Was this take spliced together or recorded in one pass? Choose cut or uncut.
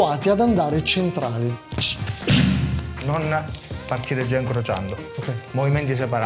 cut